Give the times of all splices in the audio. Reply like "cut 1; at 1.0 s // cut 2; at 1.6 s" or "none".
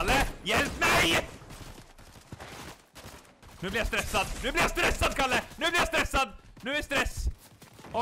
none